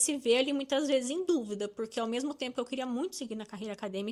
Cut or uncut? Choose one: uncut